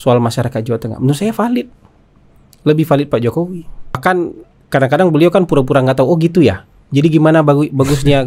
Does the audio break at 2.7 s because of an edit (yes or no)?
no